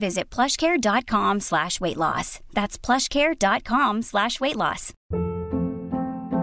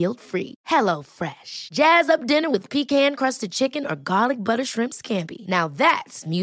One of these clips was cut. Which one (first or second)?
first